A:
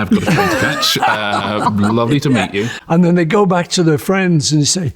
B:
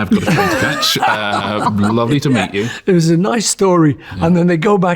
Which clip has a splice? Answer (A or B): A